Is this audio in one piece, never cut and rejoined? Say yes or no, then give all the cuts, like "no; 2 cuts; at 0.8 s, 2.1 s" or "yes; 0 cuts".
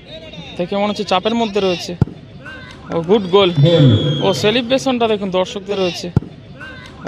no; 1 cut; at 5.7 s